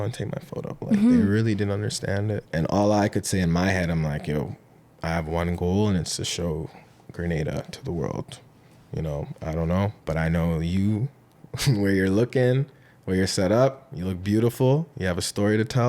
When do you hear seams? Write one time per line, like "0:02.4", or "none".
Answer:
0:02.4
0:10.0